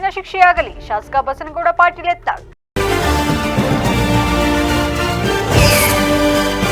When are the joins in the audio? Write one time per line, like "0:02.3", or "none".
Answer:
0:02.6

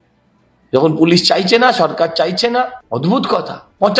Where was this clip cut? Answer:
0:02.8

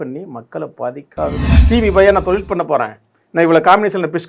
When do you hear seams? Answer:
0:01.5

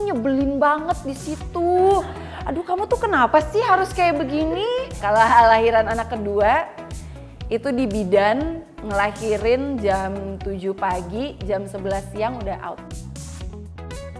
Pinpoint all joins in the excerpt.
0:04.9
0:12.9

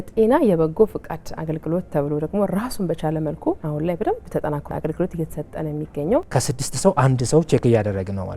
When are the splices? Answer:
0:03.6
0:04.7
0:06.3

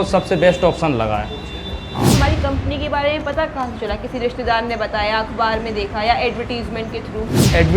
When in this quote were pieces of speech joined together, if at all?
0:02.1

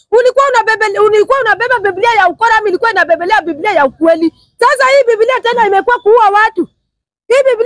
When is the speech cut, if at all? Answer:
0:04.4

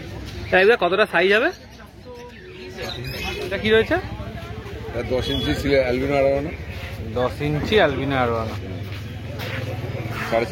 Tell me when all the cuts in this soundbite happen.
0:03.6

